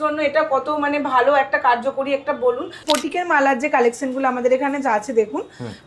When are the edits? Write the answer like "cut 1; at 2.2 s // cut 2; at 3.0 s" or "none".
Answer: cut 1; at 2.8 s